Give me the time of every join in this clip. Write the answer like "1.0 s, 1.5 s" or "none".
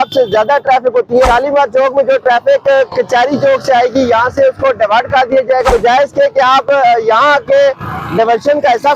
1.2 s, 5.7 s